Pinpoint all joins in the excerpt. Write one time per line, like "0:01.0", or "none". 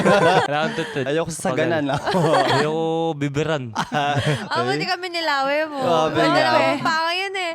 0:01.0